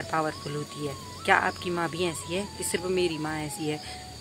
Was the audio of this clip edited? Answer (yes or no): no